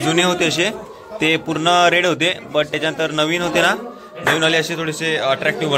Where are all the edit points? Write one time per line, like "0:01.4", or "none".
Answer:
none